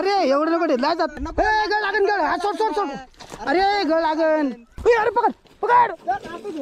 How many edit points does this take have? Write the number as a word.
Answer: two